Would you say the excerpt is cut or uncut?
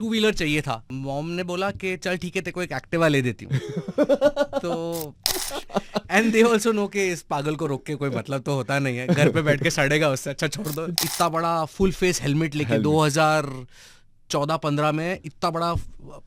cut